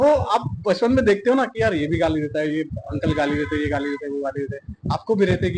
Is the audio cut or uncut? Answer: uncut